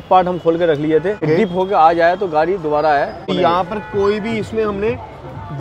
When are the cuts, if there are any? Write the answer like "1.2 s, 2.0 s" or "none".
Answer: 1.2 s, 3.3 s